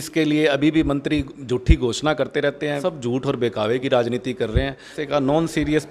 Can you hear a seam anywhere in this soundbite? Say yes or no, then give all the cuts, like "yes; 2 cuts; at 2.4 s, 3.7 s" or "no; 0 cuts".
yes; 2 cuts; at 2.8 s, 5.0 s